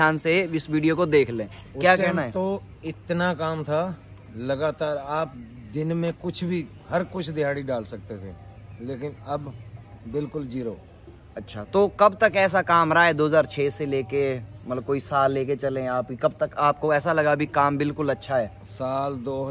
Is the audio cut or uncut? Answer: uncut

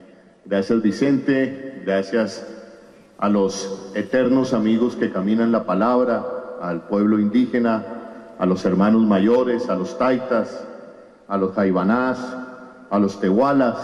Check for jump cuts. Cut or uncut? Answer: cut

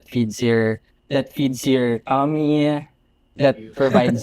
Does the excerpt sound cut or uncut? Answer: cut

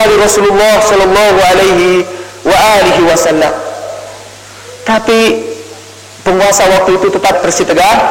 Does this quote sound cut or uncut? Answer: uncut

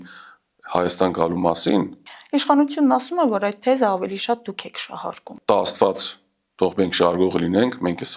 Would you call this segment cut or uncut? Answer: cut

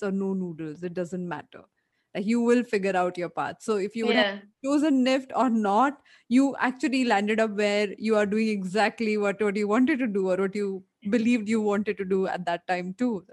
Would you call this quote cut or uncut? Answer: uncut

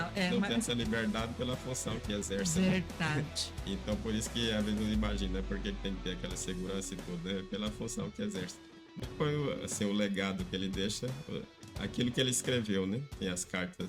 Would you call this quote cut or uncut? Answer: cut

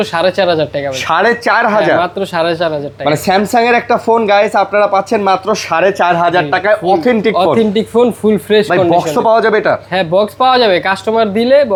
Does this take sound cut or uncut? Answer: uncut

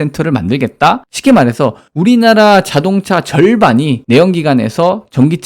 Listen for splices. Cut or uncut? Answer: cut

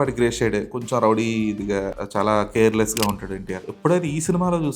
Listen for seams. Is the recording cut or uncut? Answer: cut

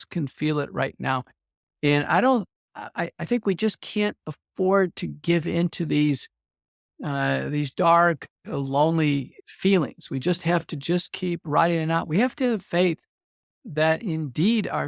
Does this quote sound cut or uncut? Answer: uncut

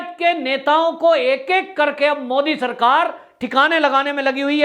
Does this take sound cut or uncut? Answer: uncut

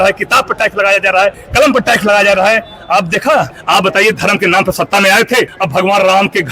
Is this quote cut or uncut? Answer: cut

